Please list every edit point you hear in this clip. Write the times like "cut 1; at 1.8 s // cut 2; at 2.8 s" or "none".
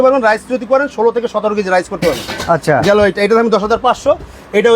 none